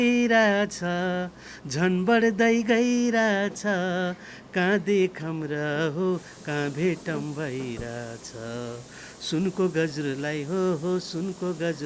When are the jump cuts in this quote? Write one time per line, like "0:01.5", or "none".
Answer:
none